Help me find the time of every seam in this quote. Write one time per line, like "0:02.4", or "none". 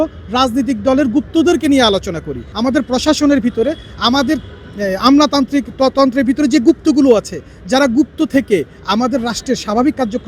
0:02.5

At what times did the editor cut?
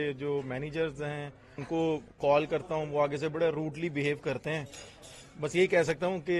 0:01.6

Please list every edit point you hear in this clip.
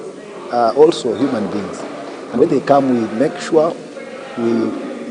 0:02.4

